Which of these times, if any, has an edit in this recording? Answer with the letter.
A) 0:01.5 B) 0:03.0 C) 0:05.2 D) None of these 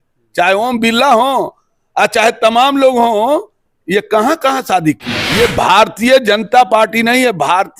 C